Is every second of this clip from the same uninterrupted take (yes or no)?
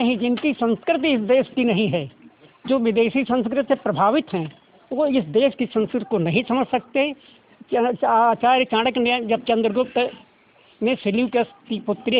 yes